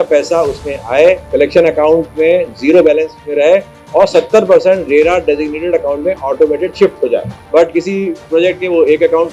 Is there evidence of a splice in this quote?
yes; 2 cuts; at 1.2 s, 7.4 s

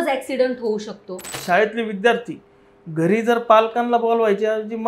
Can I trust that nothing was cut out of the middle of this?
no; 1 cut; at 1.4 s

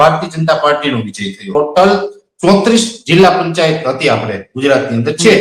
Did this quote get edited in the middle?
yes; 1 cut; at 1.5 s

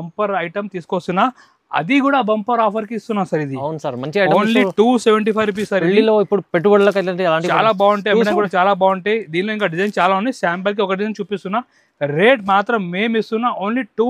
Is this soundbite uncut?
yes; 0 cuts

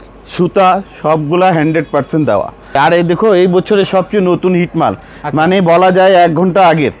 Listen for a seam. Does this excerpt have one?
yes; 1 cut; at 2.8 s

